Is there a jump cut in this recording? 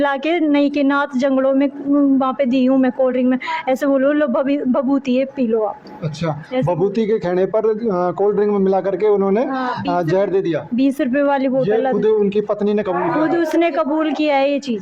no; 0 cuts

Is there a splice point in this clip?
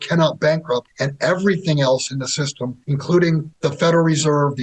yes; 3 cuts; at 1.0 s, 2.8 s, 3.5 s

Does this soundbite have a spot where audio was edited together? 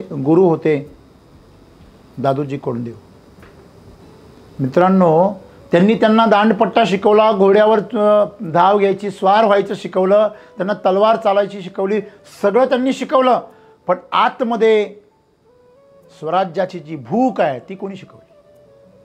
no; 0 cuts

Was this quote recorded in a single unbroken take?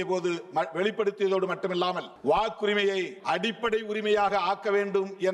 no; 2 cuts; at 2.1 s, 3.1 s

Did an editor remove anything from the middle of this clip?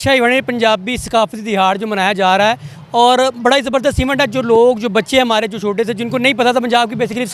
no; 0 cuts

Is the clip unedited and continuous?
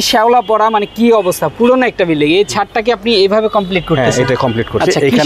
yes; 0 cuts

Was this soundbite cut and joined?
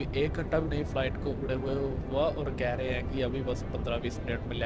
no; 0 cuts

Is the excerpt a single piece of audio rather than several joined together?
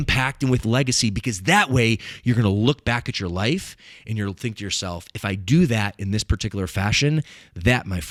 yes; 0 cuts

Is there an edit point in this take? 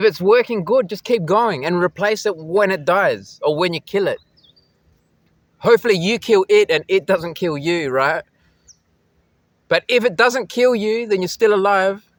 no; 0 cuts

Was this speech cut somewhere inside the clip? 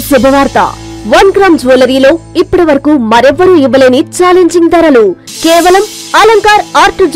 no; 0 cuts

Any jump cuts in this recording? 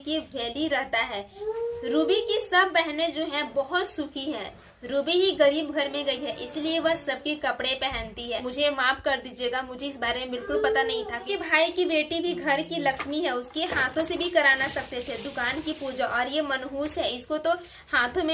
yes; 3 cuts; at 1.3 s, 8.4 s, 11.3 s

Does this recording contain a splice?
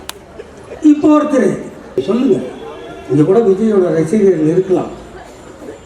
yes; 1 cut; at 1.8 s

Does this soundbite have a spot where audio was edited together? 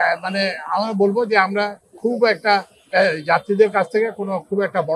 no; 0 cuts

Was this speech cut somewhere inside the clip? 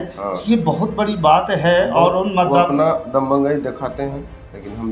no; 0 cuts

